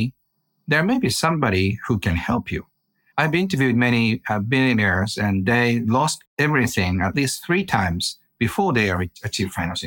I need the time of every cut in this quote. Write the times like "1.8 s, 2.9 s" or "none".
6.3 s